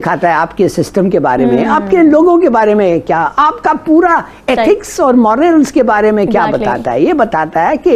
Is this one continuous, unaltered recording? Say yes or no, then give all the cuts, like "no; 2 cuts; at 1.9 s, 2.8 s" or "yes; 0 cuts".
yes; 0 cuts